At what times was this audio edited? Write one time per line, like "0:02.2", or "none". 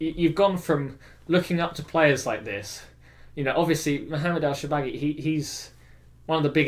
none